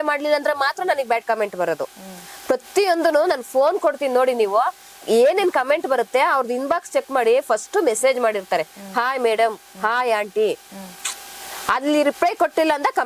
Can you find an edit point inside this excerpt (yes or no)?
no